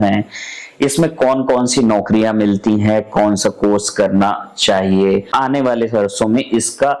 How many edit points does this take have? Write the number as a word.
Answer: one